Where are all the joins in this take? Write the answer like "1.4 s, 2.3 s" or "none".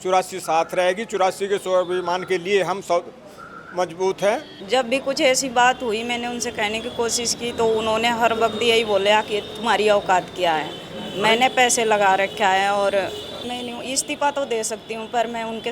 4.5 s, 13.4 s